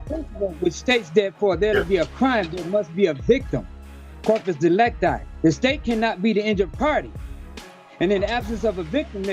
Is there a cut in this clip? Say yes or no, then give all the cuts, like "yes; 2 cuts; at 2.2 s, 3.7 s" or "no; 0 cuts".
no; 0 cuts